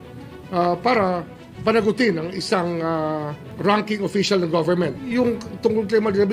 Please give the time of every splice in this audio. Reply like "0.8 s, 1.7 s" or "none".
3.4 s, 4.9 s